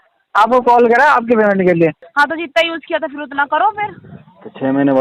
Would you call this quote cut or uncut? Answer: cut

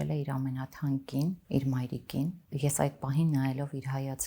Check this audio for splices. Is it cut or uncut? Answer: cut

